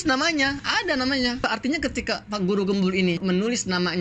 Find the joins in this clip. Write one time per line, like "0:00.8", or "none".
0:01.5
0:03.2